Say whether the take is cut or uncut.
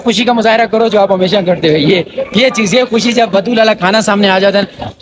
uncut